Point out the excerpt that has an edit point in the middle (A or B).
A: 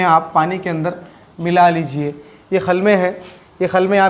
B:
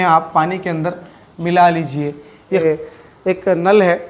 B